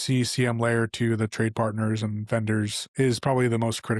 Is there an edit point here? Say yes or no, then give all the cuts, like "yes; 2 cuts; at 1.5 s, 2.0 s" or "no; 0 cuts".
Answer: yes; 1 cut; at 2.8 s